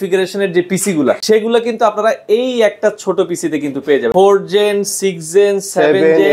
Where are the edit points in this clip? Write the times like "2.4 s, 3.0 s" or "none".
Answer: 1.2 s, 4.1 s